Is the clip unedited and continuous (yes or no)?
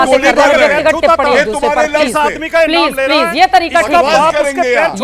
yes